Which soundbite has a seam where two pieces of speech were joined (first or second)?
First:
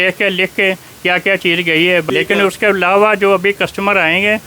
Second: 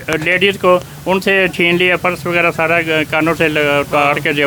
first